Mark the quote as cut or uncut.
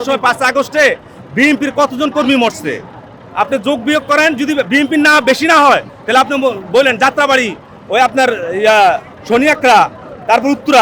uncut